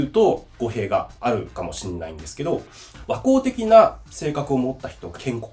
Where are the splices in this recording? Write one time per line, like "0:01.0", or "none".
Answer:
0:01.1